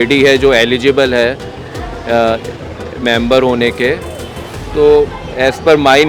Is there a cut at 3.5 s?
no; 0 cuts

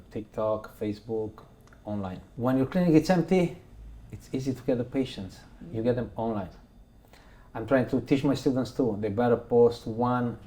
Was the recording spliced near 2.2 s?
yes; 1 cut; at 2.2 s

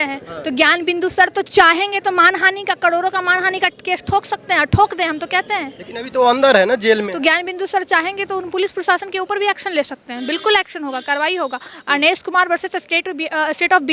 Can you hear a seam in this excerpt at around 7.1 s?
yes; 1 cut; at 7.1 s

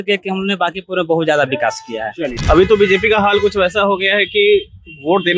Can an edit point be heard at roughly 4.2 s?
no; 1 cut; at 2.4 s

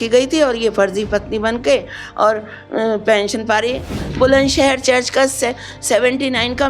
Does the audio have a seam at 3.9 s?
yes; 1 cut; at 3.9 s

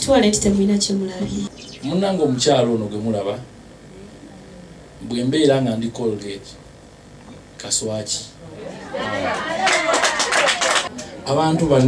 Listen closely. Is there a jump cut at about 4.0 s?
no; 2 cuts; at 1.6 s, 10.8 s

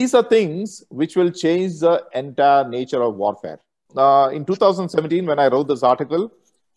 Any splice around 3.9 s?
yes; 1 cut; at 3.9 s

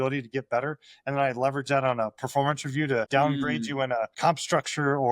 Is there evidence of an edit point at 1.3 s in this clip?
no; 2 cuts; at 3.1 s, 4.1 s

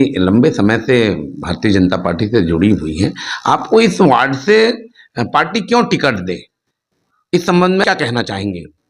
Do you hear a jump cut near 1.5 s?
no; 1 cut; at 7.8 s

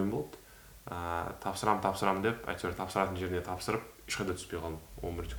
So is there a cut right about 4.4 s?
no; 0 cuts

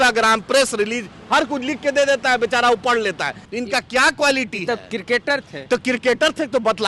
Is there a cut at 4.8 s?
no; 1 cut; at 3.4 s

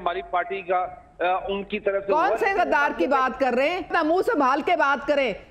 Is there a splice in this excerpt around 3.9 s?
yes; 1 cut; at 3.9 s

